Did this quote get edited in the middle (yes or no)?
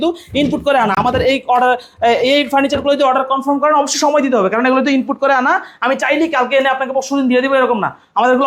no